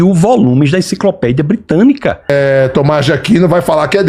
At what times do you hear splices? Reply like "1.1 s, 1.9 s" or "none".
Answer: 2.3 s